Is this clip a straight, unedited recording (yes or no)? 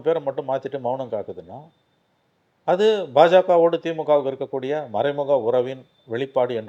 yes